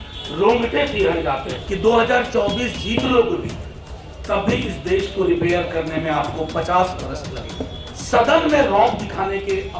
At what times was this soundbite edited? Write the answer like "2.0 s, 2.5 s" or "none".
1.5 s, 7.9 s